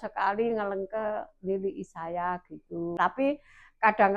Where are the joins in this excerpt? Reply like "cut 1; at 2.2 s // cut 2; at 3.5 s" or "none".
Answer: cut 1; at 3.0 s